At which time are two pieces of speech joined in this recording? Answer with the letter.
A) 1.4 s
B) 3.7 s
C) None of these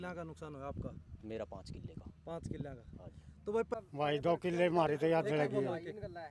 B